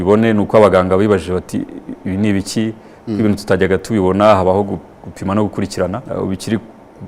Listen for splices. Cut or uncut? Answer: cut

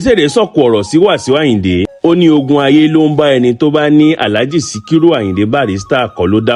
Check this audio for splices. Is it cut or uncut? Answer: uncut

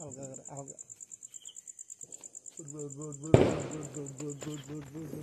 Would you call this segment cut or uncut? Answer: uncut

